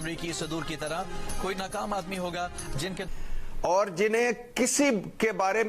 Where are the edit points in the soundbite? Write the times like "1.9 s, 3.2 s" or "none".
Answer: 3.1 s